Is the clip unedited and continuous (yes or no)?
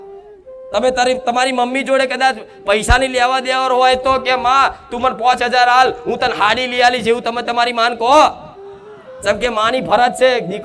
yes